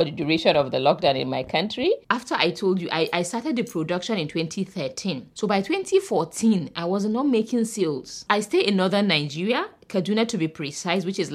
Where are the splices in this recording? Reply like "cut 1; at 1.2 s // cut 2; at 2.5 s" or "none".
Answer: cut 1; at 2.0 s // cut 2; at 8.2 s